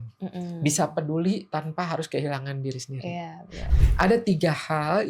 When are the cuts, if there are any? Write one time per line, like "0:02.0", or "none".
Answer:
0:03.6

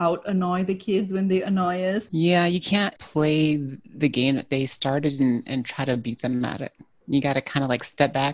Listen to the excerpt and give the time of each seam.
0:02.0
0:03.0

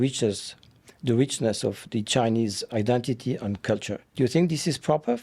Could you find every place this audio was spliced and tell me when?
0:04.0

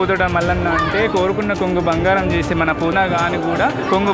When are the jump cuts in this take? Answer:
0:02.9

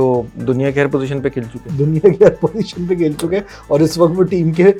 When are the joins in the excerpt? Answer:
none

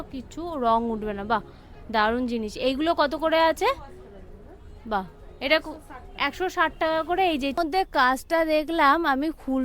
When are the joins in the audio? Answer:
0:07.5

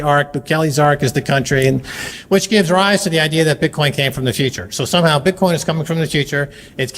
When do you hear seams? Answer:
0:02.1

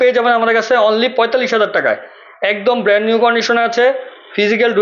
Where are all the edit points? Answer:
none

